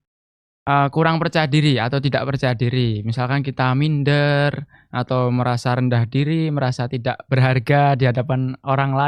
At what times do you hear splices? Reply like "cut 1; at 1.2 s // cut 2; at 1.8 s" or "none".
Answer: none